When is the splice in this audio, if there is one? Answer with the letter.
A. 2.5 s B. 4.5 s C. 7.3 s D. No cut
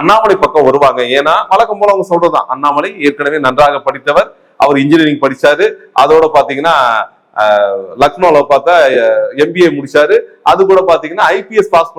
D